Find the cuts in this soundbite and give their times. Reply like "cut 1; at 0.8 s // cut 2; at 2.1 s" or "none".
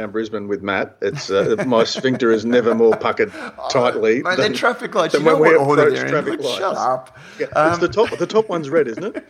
none